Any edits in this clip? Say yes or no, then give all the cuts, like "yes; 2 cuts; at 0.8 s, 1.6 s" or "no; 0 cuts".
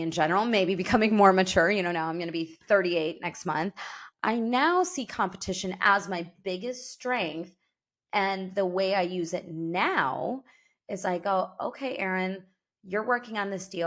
yes; 1 cut; at 4.1 s